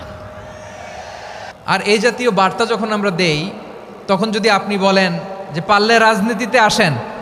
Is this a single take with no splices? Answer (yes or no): no